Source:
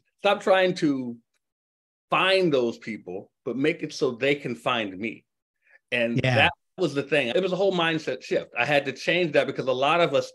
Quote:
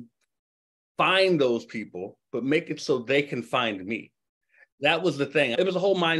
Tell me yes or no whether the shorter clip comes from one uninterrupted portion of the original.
no